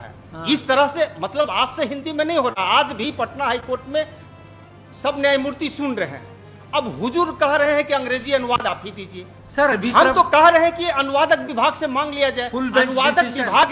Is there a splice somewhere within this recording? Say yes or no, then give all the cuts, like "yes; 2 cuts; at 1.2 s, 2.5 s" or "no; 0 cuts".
no; 0 cuts